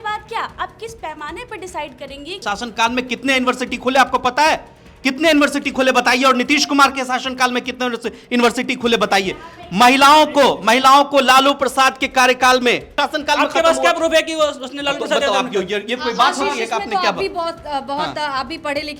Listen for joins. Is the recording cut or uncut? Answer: cut